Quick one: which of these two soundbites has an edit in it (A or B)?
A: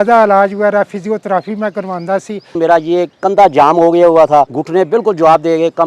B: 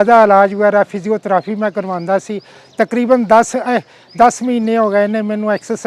A